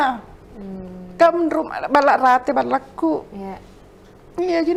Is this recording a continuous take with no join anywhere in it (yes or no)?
yes